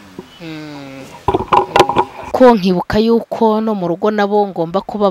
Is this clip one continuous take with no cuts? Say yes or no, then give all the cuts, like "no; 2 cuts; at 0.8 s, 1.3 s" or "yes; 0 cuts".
no; 1 cut; at 2.3 s